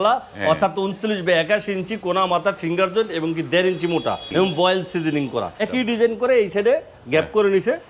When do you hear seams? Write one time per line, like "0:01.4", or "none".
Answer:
0:04.2
0:05.7